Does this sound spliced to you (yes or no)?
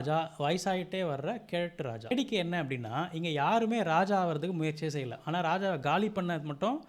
yes